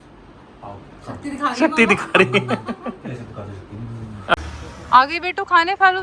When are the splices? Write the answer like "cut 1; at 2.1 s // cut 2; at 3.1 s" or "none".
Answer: cut 1; at 4.3 s